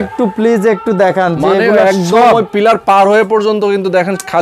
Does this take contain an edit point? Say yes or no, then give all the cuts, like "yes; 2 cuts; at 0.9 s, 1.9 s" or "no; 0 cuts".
no; 0 cuts